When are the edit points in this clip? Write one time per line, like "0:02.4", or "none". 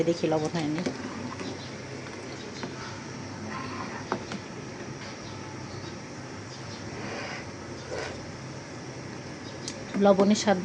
none